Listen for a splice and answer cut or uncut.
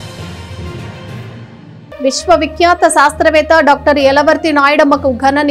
uncut